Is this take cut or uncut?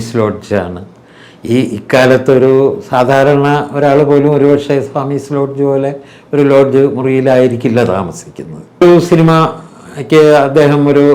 cut